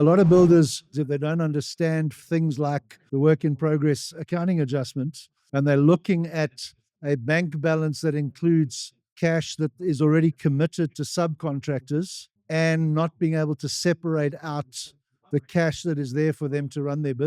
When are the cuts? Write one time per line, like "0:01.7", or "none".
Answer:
0:00.9